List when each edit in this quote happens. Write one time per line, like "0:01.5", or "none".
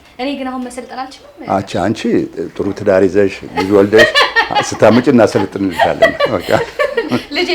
none